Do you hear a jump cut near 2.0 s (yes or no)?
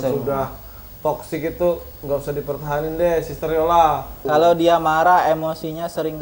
no